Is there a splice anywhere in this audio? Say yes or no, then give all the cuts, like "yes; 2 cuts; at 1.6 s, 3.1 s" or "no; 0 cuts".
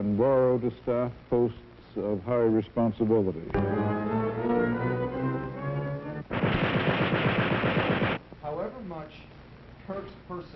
yes; 1 cut; at 1.0 s